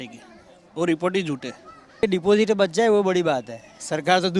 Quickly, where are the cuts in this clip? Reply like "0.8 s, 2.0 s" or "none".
2.0 s